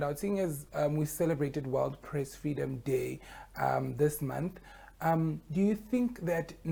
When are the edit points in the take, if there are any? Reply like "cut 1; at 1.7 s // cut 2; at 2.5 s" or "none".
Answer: none

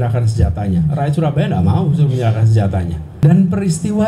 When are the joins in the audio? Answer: cut 1; at 3.1 s

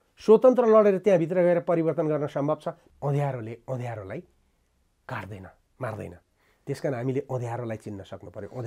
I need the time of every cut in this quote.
cut 1; at 2.8 s

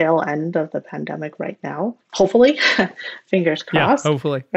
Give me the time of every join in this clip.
cut 1; at 2.0 s

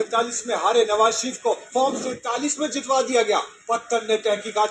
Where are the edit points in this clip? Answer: none

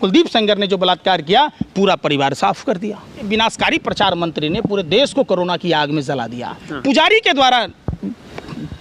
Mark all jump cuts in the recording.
cut 1; at 3.3 s // cut 2; at 6.7 s

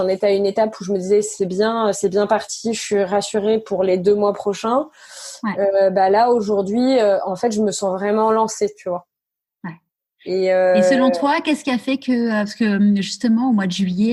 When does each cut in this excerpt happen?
none

